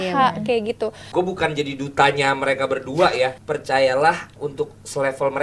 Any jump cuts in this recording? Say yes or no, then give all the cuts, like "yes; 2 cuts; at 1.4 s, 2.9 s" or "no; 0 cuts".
yes; 3 cuts; at 1.0 s, 3.4 s, 4.4 s